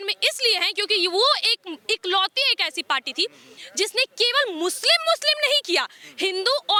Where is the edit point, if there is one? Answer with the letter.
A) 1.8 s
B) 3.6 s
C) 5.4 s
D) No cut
D